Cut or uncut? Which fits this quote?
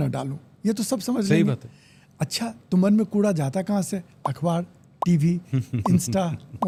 uncut